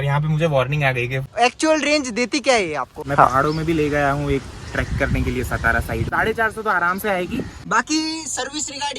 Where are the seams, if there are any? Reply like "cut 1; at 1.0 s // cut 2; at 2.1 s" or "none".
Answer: cut 1; at 1.2 s // cut 2; at 3.0 s // cut 3; at 6.1 s // cut 4; at 7.6 s